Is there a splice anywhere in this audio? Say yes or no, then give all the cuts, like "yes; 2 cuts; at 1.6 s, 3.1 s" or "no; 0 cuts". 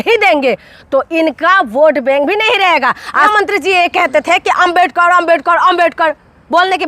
yes; 1 cut; at 3.3 s